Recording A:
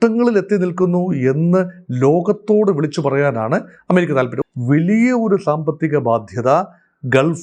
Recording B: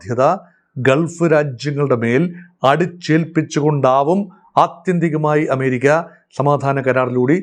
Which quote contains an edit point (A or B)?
A